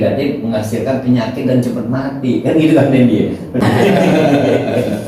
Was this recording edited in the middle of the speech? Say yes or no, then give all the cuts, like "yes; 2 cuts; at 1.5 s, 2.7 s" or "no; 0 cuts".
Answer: yes; 1 cut; at 3.6 s